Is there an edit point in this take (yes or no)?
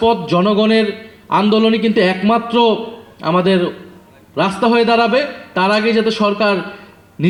no